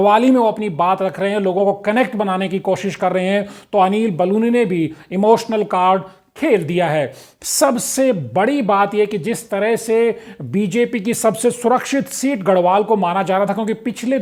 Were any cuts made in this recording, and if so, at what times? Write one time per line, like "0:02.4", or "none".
none